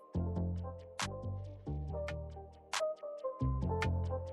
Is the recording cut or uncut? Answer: cut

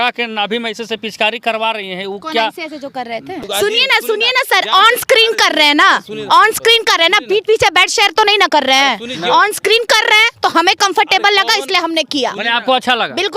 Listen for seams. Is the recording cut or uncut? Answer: cut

